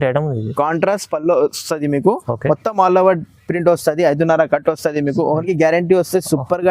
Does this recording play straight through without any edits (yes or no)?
no